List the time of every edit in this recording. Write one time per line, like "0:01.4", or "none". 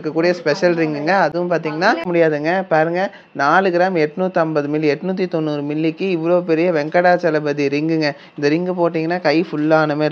none